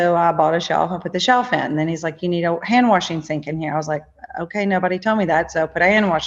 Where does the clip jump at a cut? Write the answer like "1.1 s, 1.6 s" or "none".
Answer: none